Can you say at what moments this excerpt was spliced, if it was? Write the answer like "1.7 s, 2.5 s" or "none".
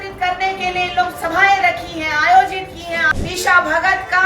3.1 s

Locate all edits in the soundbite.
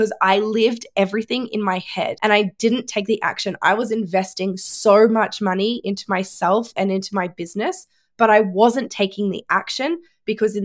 2.2 s

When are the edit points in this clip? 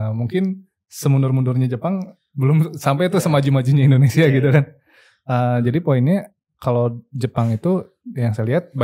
none

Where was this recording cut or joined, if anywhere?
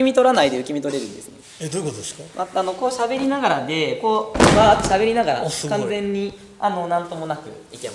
none

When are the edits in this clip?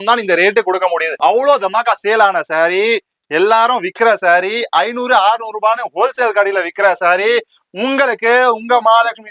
1.1 s

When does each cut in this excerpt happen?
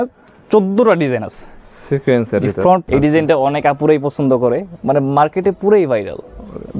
2.8 s

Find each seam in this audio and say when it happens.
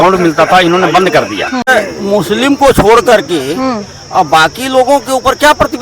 1.7 s

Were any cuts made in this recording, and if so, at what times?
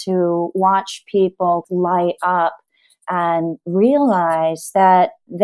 1.6 s

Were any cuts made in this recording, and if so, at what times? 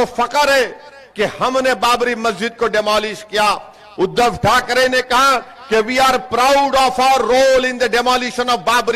none

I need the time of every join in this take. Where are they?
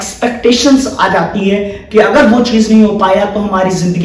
none

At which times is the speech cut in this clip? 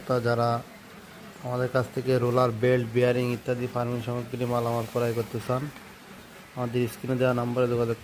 none

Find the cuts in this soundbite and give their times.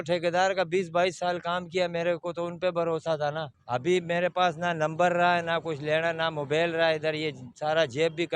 3.5 s

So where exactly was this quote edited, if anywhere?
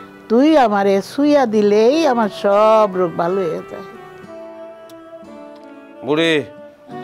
none

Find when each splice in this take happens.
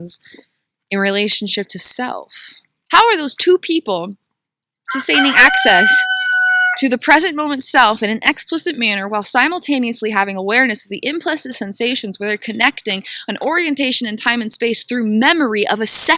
2.8 s

